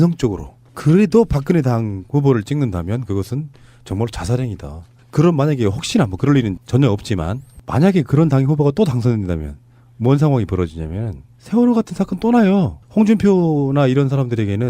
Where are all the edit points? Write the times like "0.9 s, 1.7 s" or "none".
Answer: 7.5 s